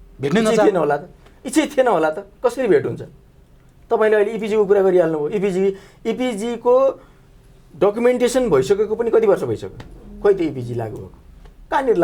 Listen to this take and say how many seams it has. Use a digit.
0